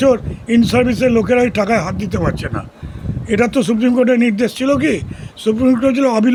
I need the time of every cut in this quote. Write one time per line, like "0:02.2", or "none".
none